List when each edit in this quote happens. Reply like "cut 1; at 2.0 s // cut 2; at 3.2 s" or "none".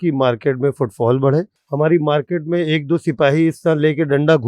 cut 1; at 1.6 s